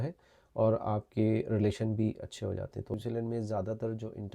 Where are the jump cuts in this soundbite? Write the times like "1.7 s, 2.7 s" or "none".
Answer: 2.9 s